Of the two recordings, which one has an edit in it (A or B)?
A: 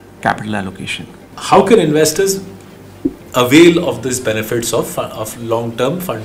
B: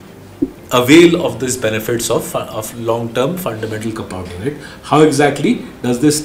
A